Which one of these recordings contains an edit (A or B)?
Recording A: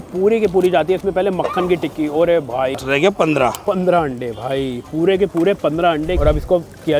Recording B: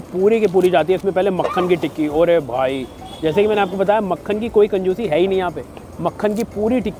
A